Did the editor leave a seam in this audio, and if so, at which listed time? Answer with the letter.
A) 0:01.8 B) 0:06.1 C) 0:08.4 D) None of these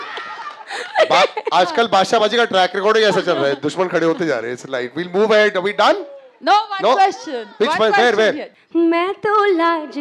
C